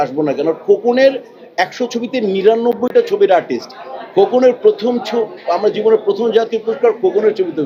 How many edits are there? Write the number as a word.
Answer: zero